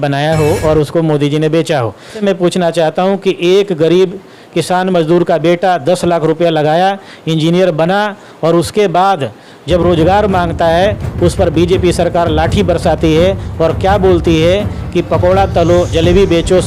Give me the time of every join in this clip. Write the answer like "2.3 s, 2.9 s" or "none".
2.2 s

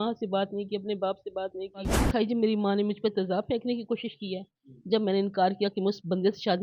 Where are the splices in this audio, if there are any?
2.0 s

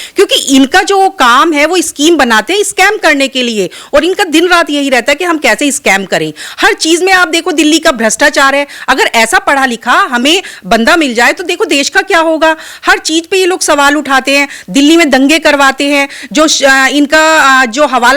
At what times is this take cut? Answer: none

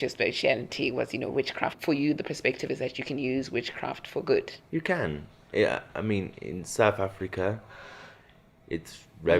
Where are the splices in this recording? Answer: 1.8 s, 4.6 s

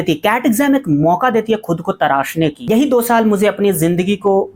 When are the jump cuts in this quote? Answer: 2.6 s

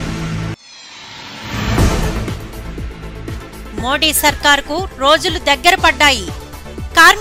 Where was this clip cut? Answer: 3.6 s

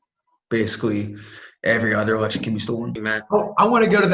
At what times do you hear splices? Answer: 3.1 s

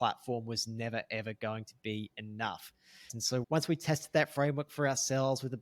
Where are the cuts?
3.2 s

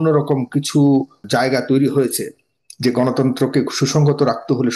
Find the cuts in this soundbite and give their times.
1.2 s

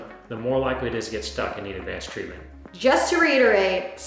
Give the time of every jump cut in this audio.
none

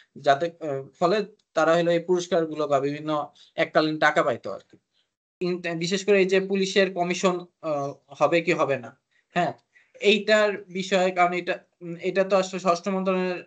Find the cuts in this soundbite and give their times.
5.4 s

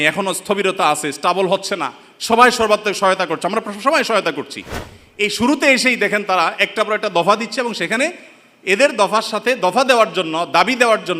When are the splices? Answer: none

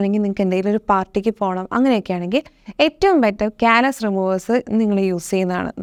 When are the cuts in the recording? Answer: none

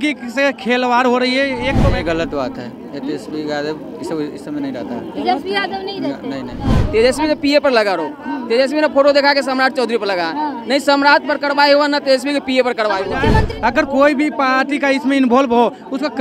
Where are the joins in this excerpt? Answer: 1.8 s, 6.7 s, 13.3 s

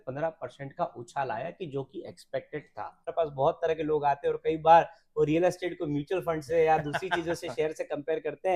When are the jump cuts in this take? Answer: 3.1 s

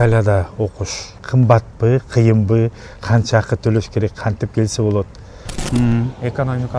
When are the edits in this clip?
1.2 s, 5.6 s

